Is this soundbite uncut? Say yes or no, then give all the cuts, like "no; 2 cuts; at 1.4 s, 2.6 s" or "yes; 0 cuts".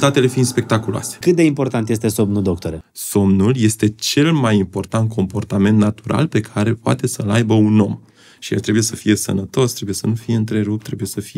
no; 2 cuts; at 1.2 s, 2.7 s